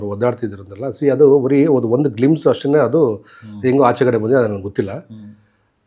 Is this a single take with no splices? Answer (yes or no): yes